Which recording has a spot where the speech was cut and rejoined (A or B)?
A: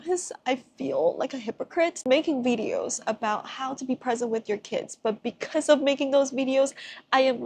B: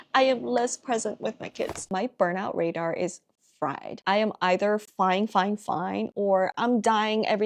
B